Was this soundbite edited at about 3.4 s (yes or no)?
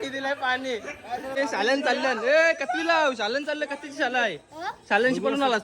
no